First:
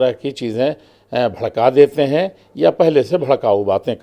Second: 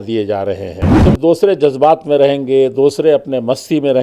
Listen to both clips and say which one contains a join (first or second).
second